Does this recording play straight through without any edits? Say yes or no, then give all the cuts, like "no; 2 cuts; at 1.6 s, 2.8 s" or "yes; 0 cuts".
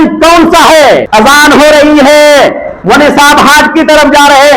no; 1 cut; at 1.1 s